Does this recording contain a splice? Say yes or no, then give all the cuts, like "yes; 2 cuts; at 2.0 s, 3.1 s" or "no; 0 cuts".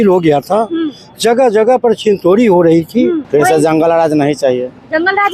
yes; 1 cut; at 3.2 s